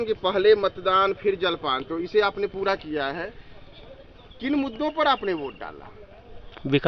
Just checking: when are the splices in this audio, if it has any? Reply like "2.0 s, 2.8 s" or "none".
none